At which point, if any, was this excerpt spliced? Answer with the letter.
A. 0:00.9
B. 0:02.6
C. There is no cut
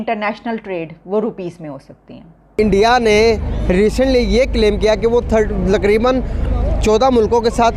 B